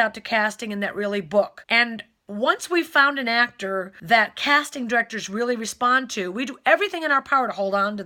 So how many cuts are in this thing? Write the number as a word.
two